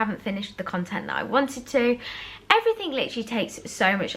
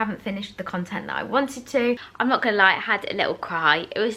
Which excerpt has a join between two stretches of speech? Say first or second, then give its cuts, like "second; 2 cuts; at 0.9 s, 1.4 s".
second; 1 cut; at 2.1 s